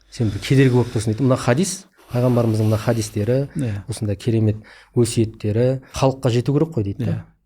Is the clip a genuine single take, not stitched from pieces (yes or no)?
no